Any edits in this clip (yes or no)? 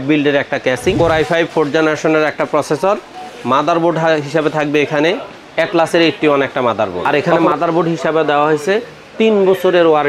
yes